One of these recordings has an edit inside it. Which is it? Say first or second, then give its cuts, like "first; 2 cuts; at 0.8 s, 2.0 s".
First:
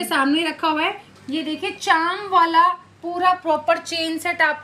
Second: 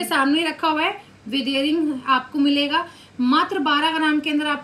first; 1 cut; at 1.1 s